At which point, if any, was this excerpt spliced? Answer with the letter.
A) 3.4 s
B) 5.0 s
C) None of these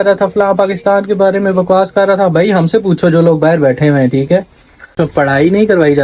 B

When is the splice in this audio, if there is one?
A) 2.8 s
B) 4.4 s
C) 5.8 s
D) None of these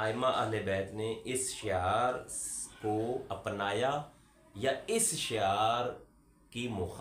D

